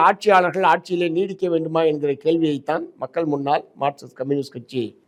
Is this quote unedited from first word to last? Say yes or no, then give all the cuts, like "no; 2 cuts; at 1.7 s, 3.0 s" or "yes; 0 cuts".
yes; 0 cuts